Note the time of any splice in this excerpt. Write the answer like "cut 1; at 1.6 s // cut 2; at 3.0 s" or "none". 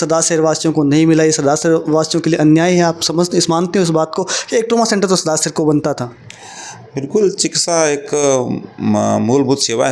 none